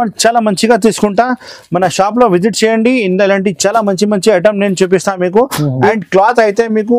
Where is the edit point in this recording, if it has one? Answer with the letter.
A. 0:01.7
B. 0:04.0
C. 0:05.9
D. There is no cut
C